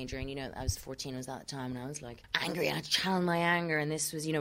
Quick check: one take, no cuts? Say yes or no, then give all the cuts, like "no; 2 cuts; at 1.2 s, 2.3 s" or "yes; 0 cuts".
no; 1 cut; at 2.2 s